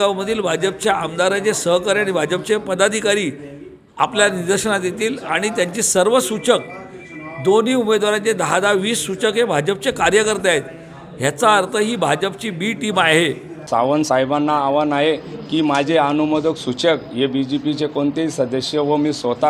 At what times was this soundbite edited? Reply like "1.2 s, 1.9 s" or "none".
13.5 s